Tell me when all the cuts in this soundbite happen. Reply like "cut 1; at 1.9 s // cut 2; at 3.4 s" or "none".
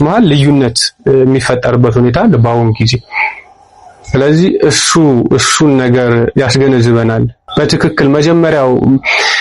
cut 1; at 7.4 s